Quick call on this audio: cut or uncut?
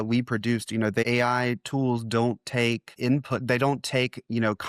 cut